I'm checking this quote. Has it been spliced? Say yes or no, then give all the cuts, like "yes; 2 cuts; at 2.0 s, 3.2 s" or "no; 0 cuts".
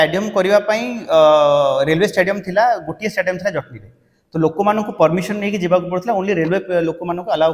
no; 0 cuts